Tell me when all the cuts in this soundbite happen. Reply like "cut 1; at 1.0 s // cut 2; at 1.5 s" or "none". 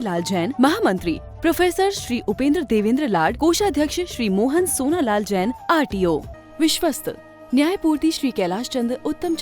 cut 1; at 6.3 s